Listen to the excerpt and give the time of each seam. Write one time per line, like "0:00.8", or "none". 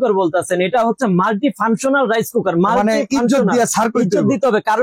none